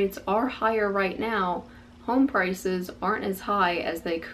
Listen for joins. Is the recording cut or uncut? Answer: uncut